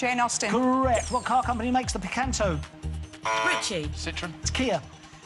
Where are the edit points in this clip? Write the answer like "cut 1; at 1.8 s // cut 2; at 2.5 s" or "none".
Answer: cut 1; at 0.9 s